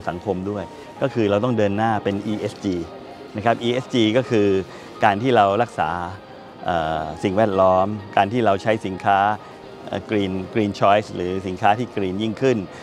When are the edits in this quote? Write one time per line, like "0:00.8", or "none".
none